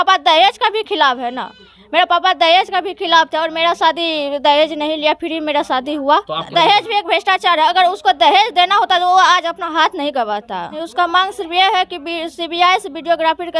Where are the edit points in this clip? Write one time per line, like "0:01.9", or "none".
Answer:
0:06.4
0:10.8